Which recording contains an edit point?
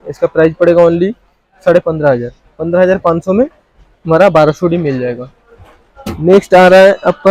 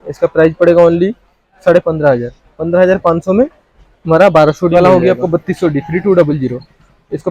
second; 1 cut; at 4.8 s

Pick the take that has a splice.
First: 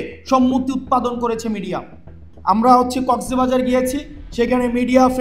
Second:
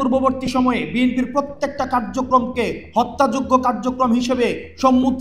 first; 1 cut; at 2.3 s

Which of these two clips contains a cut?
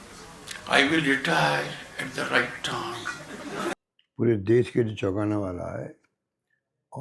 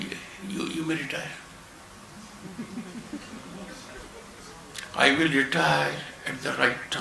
first; 1 cut; at 3.7 s

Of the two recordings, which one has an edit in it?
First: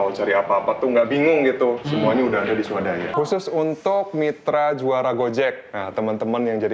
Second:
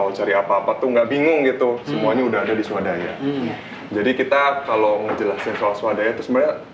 first; 1 cut; at 3.2 s

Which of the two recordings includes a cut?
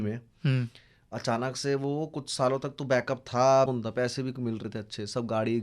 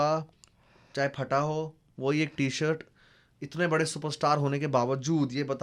first; 1 cut; at 3.7 s

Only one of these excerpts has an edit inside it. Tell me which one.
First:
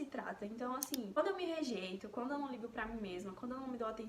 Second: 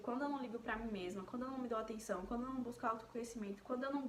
first; 1 cut; at 1.2 s

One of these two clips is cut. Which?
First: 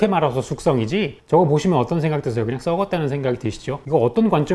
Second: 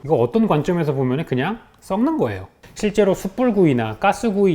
second; 1 cut; at 2.5 s

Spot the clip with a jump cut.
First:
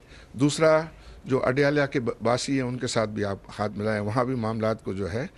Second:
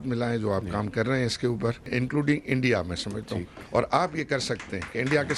second; 1 cut; at 1.9 s

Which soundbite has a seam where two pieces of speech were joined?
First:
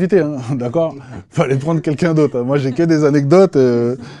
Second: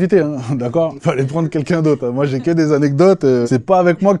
second; 2 cuts; at 1.0 s, 3.5 s

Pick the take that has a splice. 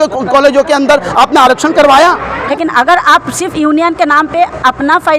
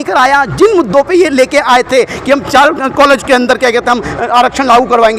first; 1 cut; at 2.4 s

